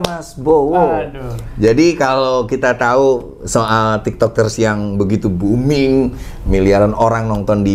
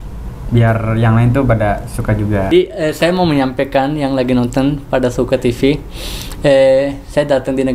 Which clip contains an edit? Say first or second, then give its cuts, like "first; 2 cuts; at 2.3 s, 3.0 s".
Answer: second; 1 cut; at 2.5 s